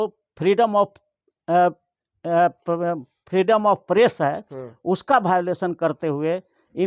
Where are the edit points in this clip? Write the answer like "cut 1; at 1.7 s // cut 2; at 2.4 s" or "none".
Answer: none